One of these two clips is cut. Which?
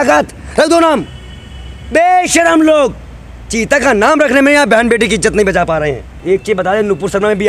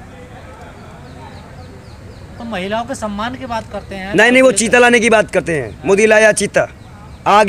first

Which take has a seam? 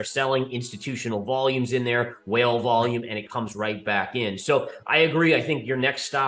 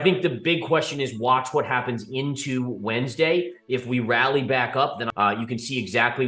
second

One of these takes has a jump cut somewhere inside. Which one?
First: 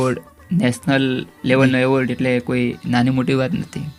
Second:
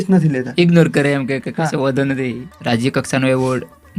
second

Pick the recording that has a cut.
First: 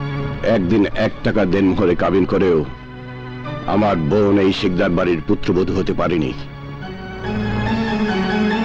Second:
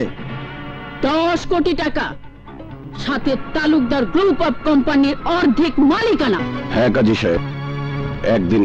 second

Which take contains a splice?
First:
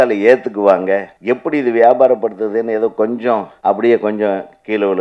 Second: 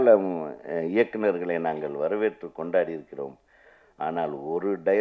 first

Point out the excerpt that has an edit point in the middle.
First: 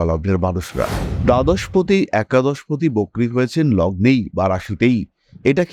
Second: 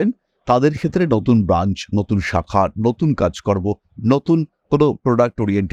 first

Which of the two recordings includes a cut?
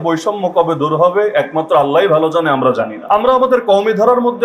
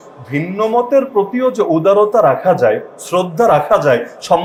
first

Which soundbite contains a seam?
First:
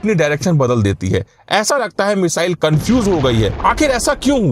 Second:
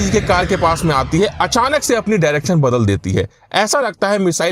first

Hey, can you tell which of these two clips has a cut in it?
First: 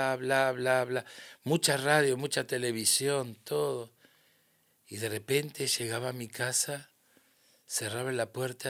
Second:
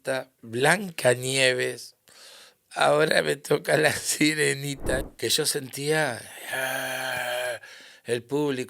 second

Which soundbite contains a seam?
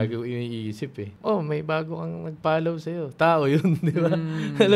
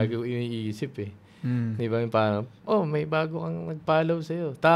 first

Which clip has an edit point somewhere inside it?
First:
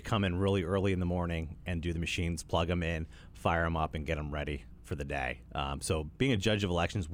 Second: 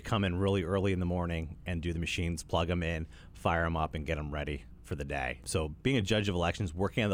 second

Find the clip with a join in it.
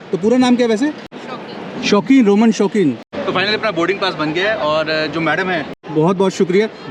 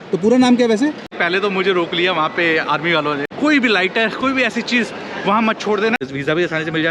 second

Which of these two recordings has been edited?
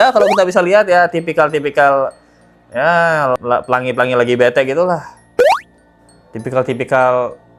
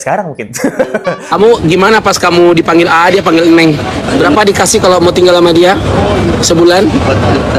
second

